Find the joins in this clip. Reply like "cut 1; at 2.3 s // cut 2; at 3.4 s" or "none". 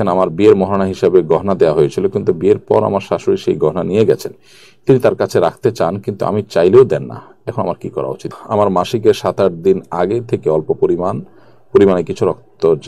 cut 1; at 8.2 s